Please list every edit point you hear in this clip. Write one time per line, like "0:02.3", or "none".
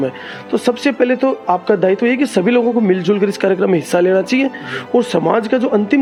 none